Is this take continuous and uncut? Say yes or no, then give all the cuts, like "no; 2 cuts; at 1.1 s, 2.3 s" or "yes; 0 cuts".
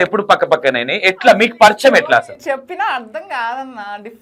yes; 0 cuts